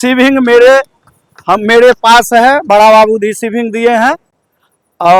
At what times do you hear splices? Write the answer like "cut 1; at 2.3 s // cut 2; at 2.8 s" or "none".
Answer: none